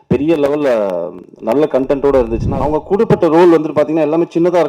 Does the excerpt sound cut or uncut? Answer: cut